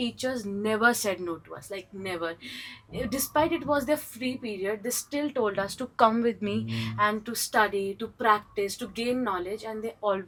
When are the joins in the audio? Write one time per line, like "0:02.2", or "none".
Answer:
none